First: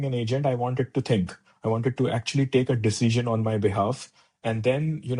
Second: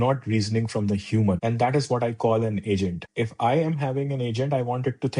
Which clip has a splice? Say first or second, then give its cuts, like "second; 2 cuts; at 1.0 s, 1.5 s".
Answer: second; 2 cuts; at 1.4 s, 3.0 s